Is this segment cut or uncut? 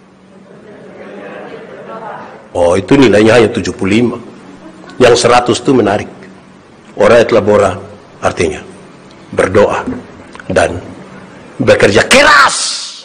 uncut